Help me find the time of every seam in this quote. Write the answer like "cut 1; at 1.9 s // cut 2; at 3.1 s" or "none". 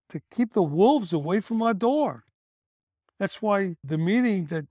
cut 1; at 3.8 s